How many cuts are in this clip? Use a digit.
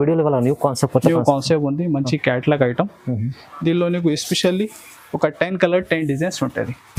0